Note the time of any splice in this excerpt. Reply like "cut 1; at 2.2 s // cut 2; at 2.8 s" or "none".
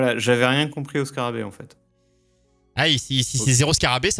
none